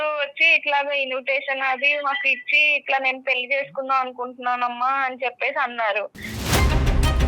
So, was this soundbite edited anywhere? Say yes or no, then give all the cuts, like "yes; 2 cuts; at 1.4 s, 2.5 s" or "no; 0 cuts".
yes; 1 cut; at 6.4 s